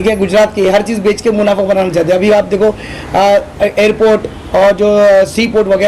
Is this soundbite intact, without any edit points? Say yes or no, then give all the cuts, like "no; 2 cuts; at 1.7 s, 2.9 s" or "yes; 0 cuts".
yes; 0 cuts